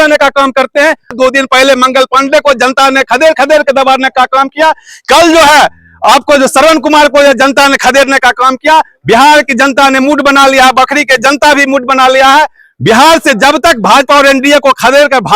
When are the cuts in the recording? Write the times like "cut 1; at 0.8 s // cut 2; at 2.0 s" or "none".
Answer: cut 1; at 1.1 s